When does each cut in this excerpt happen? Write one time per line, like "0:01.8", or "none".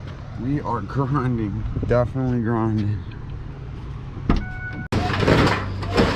0:04.9